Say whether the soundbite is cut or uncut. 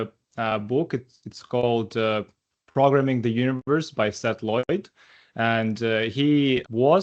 uncut